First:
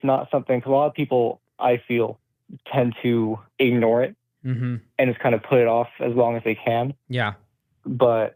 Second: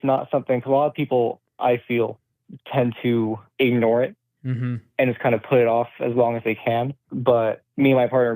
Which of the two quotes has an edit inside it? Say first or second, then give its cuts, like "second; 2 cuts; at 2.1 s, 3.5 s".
second; 1 cut; at 7.0 s